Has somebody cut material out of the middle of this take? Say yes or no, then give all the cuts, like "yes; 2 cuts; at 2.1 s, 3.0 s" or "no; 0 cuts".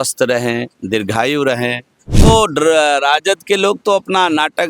yes; 1 cut; at 2.2 s